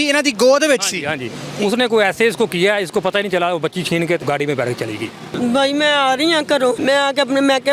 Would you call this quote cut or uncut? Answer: cut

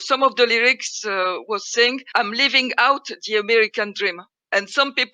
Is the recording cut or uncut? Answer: cut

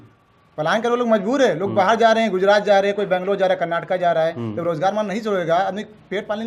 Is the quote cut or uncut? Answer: uncut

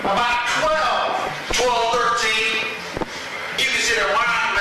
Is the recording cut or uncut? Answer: uncut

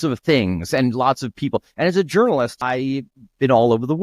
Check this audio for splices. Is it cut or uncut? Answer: cut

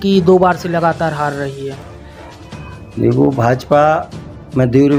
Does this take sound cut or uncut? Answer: uncut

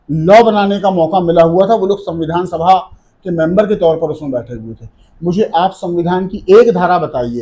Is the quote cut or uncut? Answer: uncut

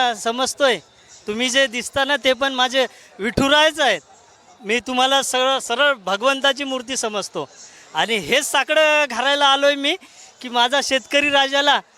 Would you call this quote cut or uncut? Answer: uncut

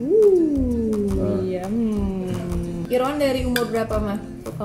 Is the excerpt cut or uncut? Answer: cut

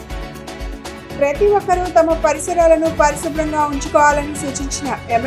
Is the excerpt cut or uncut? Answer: uncut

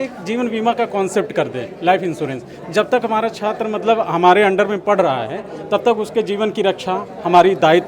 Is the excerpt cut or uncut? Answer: uncut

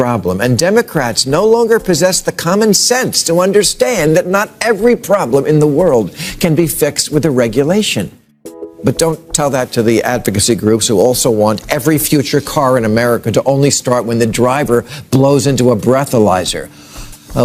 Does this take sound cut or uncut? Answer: uncut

